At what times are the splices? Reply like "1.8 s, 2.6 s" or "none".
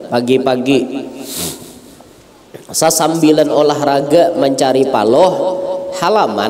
none